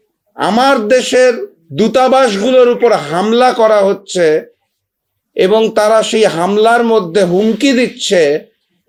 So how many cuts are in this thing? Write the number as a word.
zero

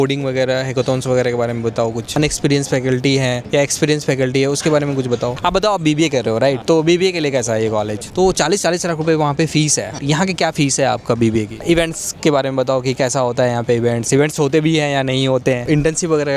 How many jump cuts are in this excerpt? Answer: six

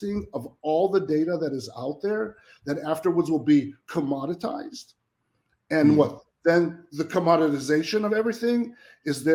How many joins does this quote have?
zero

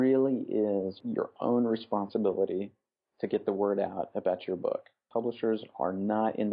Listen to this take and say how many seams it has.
one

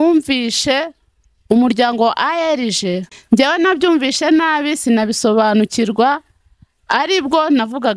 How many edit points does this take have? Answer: one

